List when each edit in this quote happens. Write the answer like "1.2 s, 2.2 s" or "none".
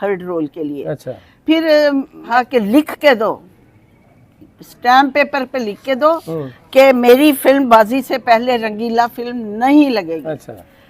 2.3 s

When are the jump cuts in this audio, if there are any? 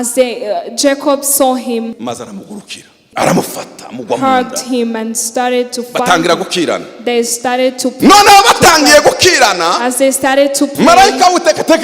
2.0 s, 3.0 s

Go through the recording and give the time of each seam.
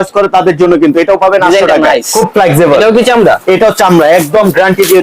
2.1 s

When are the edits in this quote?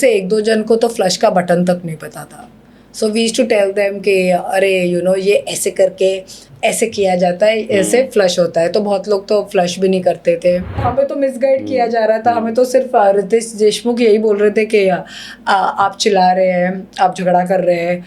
10.8 s

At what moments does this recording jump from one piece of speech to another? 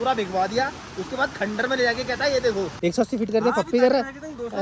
2.7 s

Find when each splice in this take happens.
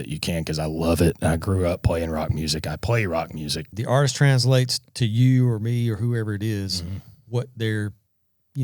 3.7 s

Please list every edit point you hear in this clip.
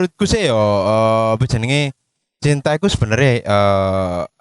none

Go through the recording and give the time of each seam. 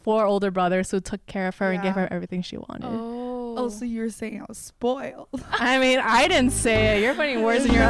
none

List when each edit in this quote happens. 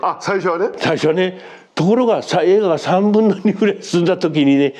none

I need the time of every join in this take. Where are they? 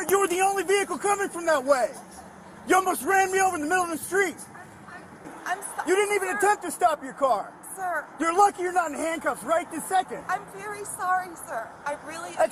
5.3 s

